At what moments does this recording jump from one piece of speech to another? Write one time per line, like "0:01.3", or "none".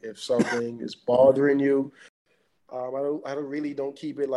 0:02.2